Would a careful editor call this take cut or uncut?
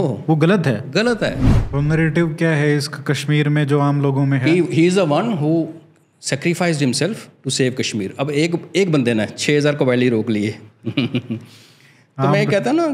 cut